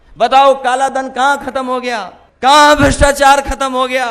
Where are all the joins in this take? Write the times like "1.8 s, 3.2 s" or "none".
2.2 s